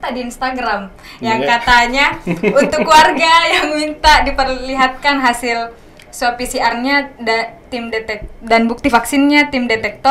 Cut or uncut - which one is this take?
uncut